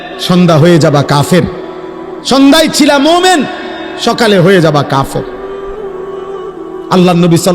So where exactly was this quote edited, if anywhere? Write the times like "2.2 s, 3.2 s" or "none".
5.2 s, 6.6 s